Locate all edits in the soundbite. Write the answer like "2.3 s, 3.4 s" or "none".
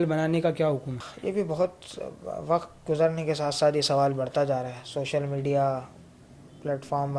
1.0 s

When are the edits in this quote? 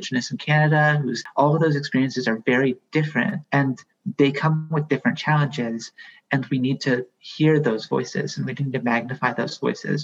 1.2 s, 3.4 s

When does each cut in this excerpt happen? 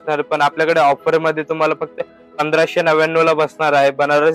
none

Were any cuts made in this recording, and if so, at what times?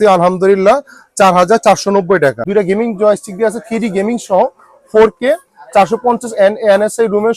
2.4 s

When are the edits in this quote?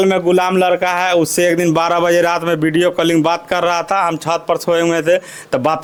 none

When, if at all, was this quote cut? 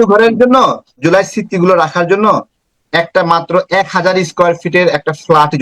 1.0 s

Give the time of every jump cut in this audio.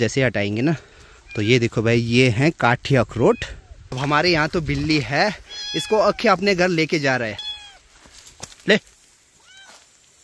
none

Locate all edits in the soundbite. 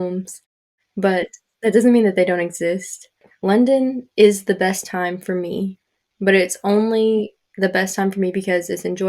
3.3 s

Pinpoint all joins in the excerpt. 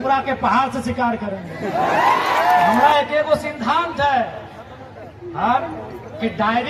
2.8 s

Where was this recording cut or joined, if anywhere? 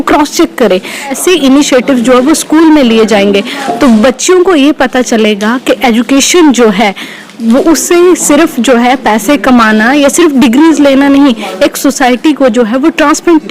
1.1 s

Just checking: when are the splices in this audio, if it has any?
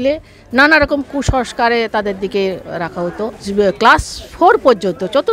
3.4 s

